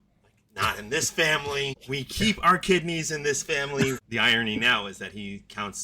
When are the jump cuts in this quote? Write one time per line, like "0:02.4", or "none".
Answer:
0:01.8
0:04.0

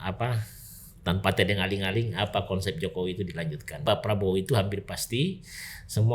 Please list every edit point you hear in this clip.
0:03.8

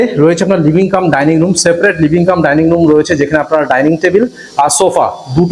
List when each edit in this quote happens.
none

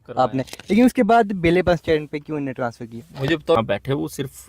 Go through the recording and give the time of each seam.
0:03.6

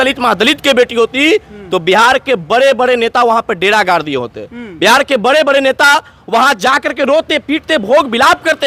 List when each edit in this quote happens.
none

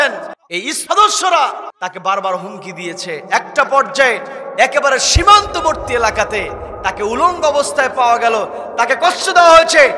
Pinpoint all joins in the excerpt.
0:00.8
0:01.7

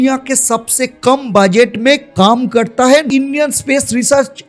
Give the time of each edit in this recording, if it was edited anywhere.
0:03.1

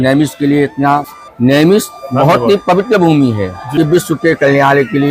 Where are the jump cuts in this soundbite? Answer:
0:01.2
0:03.6

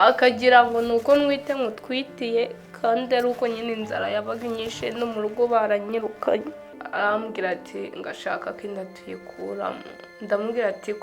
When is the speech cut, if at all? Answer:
0:06.8

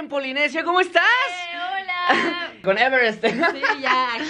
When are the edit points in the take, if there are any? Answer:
0:02.6

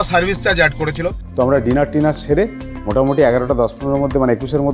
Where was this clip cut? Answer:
0:01.2

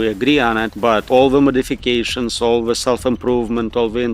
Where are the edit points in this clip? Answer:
0:00.9

